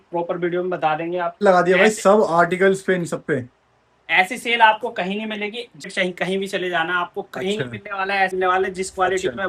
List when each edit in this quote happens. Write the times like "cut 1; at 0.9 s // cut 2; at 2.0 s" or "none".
cut 1; at 1.4 s // cut 2; at 5.9 s // cut 3; at 8.3 s